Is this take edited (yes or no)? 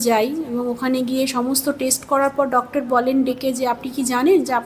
yes